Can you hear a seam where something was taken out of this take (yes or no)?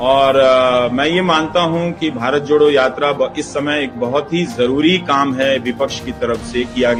no